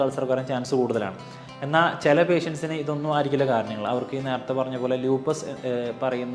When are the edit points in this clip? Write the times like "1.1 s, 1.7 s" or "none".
none